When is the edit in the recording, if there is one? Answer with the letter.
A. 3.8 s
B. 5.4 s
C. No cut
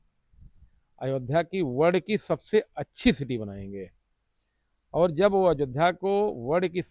C